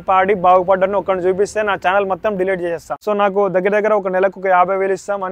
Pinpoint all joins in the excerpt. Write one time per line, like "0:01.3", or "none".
0:02.9